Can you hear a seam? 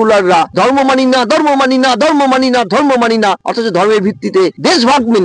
no; 0 cuts

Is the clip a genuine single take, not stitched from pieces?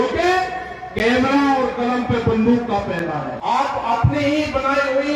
no; 1 cut; at 3.4 s

